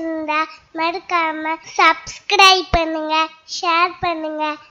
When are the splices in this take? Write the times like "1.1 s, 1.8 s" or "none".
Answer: 1.6 s